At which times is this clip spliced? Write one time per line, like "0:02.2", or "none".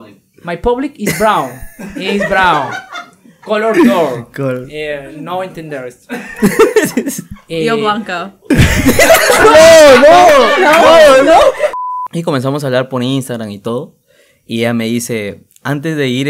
0:11.7